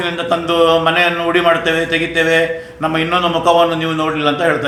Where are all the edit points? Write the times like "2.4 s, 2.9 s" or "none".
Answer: none